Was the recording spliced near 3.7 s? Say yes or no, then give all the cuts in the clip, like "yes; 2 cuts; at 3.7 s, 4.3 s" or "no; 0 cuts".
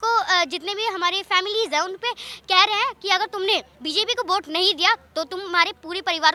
no; 0 cuts